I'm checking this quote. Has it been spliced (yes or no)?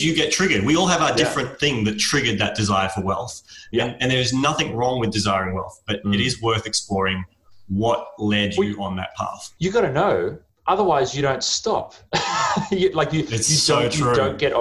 no